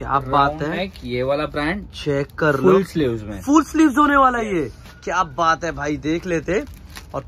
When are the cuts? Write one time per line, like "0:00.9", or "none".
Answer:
none

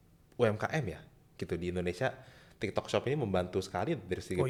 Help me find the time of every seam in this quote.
none

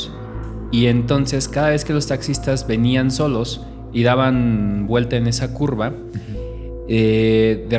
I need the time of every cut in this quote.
none

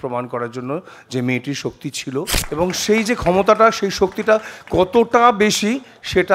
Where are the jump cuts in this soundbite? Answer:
0:02.3

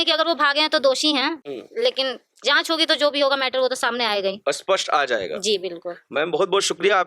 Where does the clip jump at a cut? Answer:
none

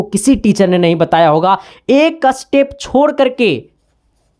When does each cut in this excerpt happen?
0:01.7

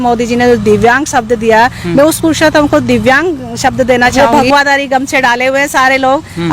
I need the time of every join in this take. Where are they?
0:04.1

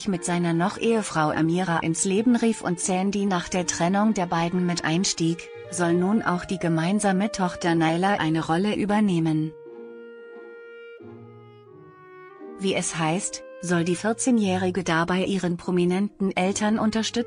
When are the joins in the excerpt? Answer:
none

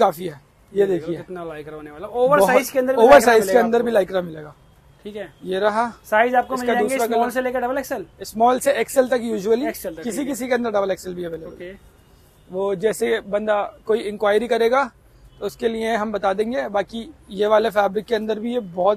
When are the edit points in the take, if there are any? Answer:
none

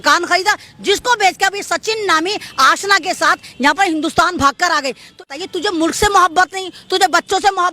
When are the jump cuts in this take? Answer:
0:05.3

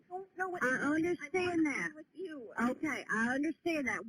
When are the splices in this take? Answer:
0:01.2

